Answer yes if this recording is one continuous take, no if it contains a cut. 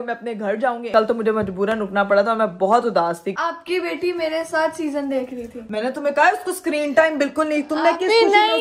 no